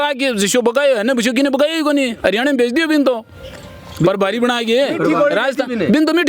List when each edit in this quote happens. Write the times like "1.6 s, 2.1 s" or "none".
none